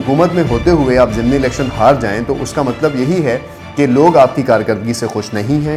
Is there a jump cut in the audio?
no; 0 cuts

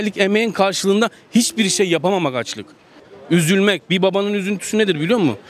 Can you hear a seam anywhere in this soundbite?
yes; 1 cut; at 3.0 s

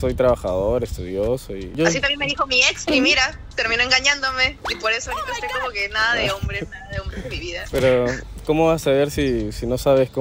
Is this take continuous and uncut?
yes; 0 cuts

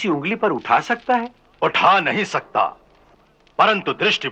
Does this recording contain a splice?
no; 0 cuts

